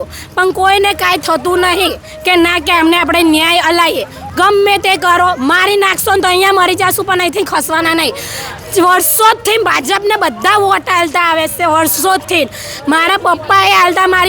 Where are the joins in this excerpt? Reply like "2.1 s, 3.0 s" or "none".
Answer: 4.2 s